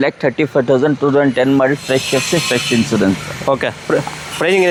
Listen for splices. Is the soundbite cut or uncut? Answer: uncut